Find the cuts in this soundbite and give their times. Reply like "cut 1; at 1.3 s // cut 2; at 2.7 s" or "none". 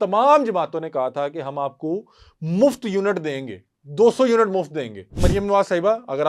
cut 1; at 5.2 s